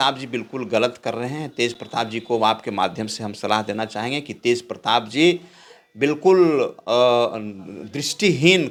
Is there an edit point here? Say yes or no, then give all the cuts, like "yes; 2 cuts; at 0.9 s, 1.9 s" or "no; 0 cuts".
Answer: no; 0 cuts